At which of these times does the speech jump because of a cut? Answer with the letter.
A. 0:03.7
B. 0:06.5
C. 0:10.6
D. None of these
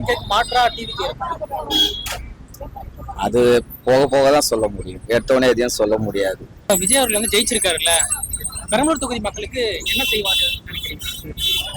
B